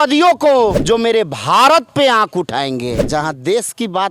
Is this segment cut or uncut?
cut